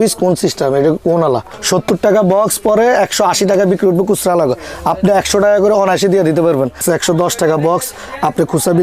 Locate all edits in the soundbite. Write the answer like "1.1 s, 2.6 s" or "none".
1.5 s, 6.8 s